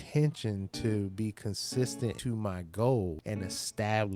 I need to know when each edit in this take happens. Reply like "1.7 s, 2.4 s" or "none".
2.2 s, 3.2 s